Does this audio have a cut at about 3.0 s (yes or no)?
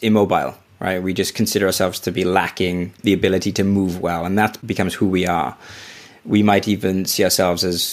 yes